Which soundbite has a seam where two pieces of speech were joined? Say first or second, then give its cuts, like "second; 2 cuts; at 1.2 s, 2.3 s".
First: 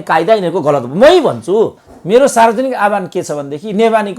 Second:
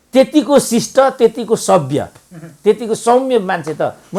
first; 1 cut; at 1.9 s